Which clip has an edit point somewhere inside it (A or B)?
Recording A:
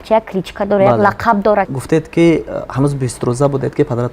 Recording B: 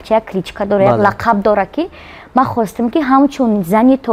A